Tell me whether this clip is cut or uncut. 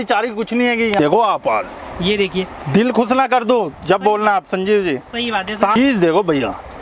cut